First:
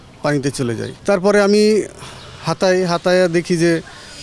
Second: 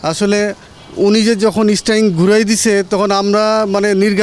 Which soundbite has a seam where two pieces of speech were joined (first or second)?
first